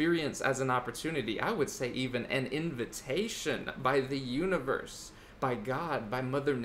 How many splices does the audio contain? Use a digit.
0